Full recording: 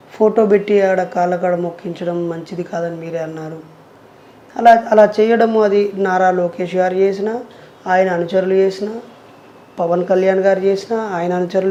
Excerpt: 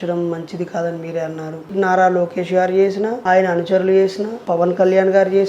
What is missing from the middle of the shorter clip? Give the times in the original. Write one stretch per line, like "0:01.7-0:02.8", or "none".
0:03.7-0:05.9
0:07.4-0:07.8
0:08.9-0:09.6